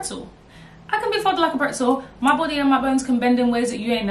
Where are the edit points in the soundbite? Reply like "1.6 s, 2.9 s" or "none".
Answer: none

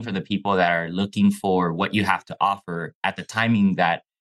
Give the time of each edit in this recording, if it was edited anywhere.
none

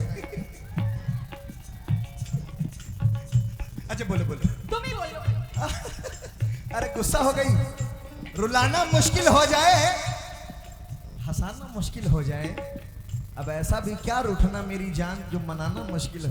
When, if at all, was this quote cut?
none

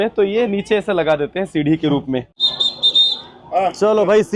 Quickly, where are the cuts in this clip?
none

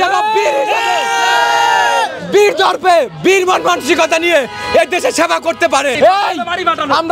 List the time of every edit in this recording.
6.0 s

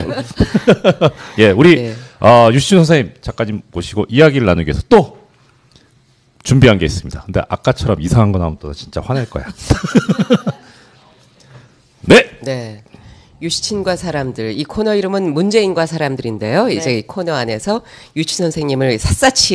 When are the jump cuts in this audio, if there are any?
none

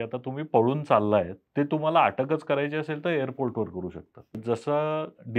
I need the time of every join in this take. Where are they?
1.4 s, 4.4 s

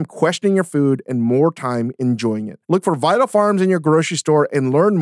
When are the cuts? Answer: none

